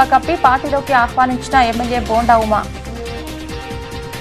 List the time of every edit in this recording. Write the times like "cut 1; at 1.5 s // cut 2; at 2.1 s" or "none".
cut 1; at 3.0 s